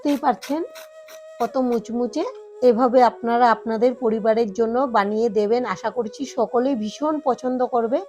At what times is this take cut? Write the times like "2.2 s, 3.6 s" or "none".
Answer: 2.4 s